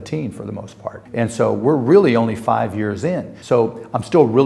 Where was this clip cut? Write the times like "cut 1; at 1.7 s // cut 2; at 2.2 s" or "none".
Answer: cut 1; at 1.0 s // cut 2; at 3.3 s